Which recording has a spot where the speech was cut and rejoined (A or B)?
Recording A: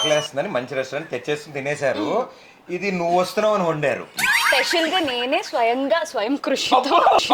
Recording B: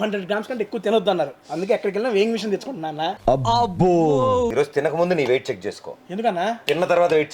B